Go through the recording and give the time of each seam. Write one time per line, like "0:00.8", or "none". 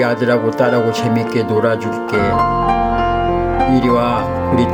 none